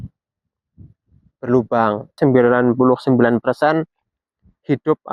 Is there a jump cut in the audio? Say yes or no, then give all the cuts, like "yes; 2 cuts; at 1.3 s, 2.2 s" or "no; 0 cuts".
yes; 1 cut; at 2.2 s